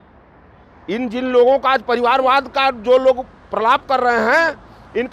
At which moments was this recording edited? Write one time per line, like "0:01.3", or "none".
none

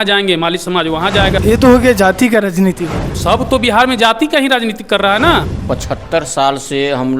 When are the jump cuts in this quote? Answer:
0:01.4
0:03.2
0:05.5

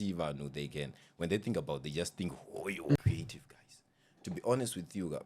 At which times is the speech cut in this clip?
0:03.0

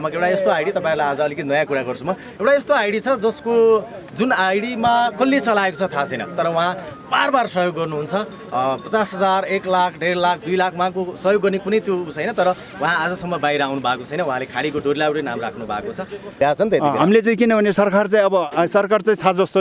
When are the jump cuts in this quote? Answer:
0:16.4

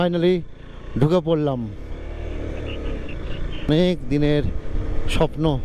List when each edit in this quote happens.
none

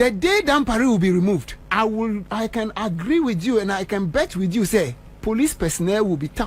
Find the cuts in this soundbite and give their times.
0:01.6

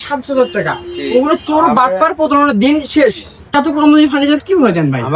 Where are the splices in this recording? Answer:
0:03.5

